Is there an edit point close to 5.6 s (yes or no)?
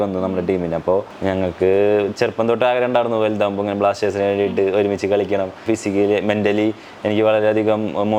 yes